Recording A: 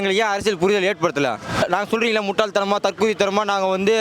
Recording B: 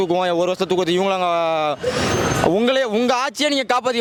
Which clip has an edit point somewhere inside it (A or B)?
A